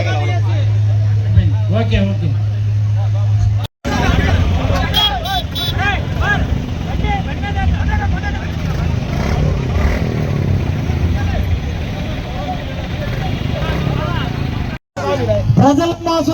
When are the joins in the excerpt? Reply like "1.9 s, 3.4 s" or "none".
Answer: none